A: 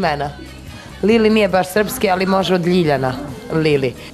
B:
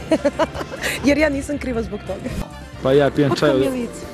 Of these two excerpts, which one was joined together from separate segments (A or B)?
B